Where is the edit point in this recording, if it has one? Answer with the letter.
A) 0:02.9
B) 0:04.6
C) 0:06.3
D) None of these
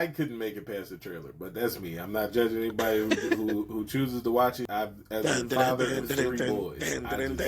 B